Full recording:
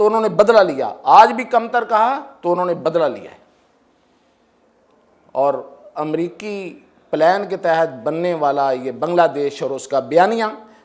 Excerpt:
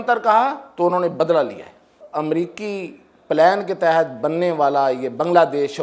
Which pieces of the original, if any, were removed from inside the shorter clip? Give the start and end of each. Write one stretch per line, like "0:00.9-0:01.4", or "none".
0:03.6-0:05.8